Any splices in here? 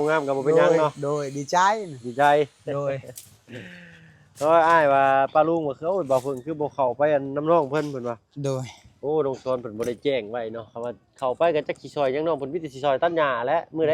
no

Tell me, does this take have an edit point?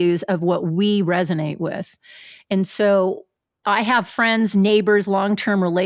no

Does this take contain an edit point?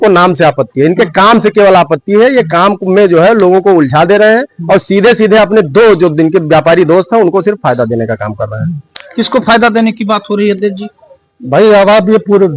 no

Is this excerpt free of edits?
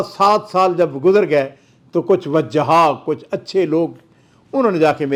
yes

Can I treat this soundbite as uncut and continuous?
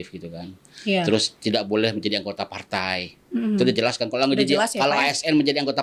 yes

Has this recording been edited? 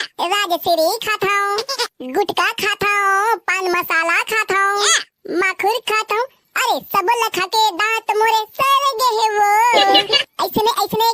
no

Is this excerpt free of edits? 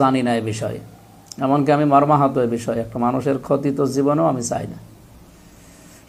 yes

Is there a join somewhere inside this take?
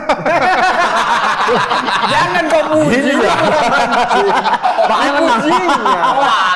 no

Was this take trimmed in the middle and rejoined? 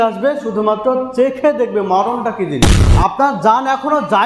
yes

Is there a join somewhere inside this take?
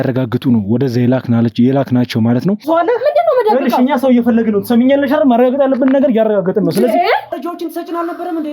yes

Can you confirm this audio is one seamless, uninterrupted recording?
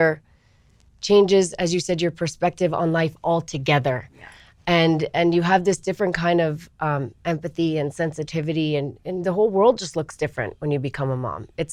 yes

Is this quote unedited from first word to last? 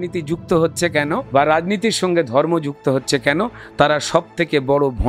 no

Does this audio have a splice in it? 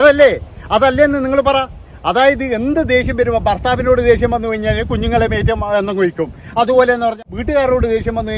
yes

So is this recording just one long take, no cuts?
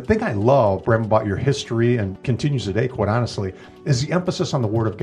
no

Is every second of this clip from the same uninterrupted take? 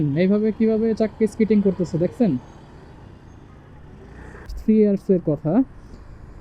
no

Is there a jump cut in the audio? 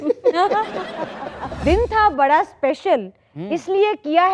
yes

